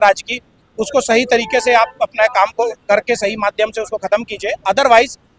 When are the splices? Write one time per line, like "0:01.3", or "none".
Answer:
none